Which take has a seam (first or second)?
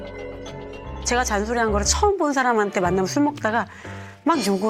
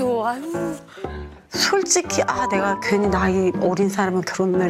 first